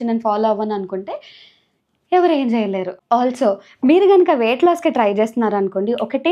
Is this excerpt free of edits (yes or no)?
yes